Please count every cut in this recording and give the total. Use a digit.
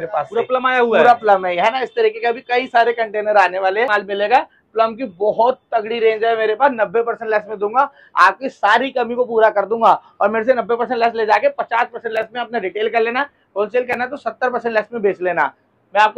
0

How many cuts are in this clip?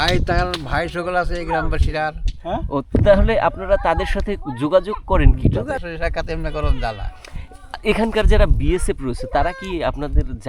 1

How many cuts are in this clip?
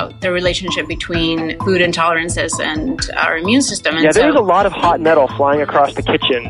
1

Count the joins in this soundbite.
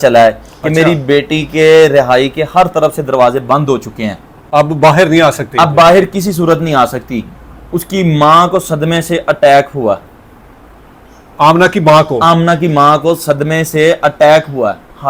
0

